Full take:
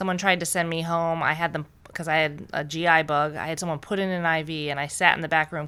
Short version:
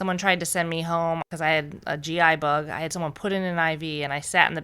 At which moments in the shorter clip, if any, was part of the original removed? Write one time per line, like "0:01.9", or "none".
0:01.2